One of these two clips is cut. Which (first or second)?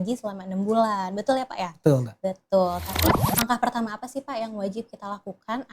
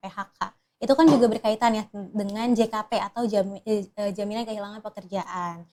first